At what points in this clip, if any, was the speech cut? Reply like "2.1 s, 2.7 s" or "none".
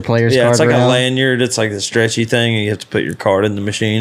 none